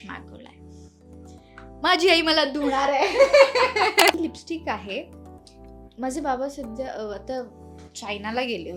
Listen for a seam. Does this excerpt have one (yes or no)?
yes